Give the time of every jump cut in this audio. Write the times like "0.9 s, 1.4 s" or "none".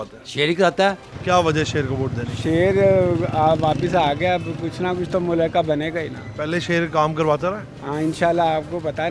1.1 s